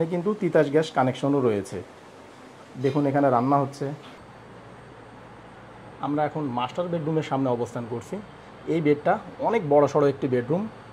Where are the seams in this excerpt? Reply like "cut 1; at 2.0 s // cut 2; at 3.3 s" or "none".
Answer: cut 1; at 4.2 s